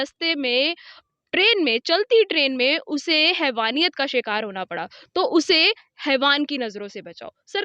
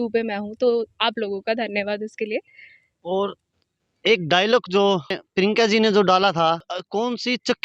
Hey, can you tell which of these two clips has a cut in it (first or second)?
second